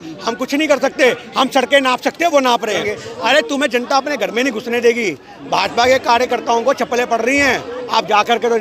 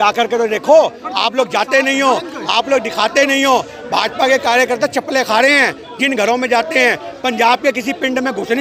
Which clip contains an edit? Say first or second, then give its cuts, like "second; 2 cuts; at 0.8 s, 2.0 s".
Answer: first; 1 cut; at 2.8 s